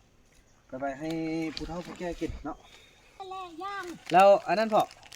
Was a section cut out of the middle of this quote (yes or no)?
yes